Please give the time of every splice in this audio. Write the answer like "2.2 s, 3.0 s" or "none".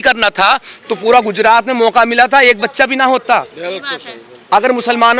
none